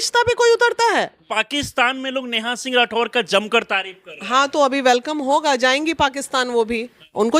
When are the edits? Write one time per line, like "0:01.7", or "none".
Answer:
0:01.2